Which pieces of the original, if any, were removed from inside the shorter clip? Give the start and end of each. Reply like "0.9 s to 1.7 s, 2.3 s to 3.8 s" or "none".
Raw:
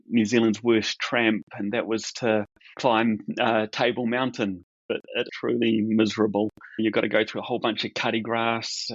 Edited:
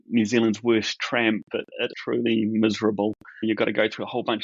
1.5 s to 4.8 s